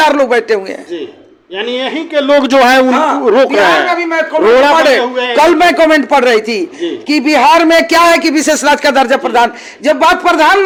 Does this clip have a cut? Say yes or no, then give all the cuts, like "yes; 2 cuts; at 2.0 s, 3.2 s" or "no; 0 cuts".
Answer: no; 0 cuts